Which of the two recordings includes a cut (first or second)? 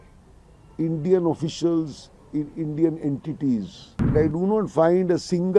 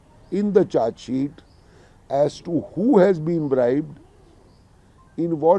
first